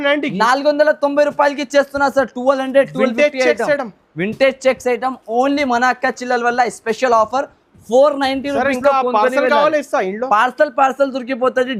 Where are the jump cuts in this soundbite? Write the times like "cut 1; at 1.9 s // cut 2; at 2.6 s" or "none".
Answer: none